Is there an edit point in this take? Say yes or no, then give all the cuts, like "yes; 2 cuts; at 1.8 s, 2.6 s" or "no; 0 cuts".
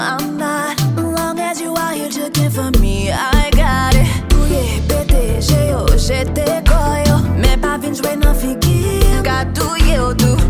no; 0 cuts